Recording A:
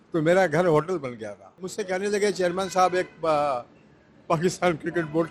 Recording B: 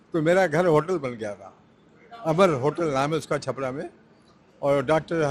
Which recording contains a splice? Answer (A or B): A